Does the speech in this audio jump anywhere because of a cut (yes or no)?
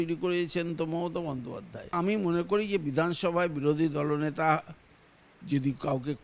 yes